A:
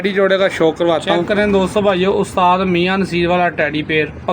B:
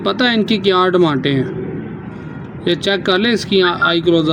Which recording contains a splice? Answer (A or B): A